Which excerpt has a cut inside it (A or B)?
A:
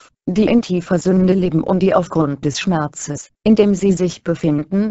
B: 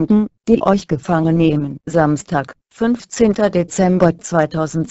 B